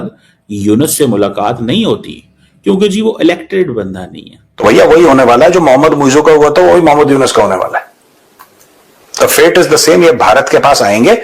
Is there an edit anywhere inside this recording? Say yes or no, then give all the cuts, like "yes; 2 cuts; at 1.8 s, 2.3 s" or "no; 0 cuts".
yes; 1 cut; at 4.6 s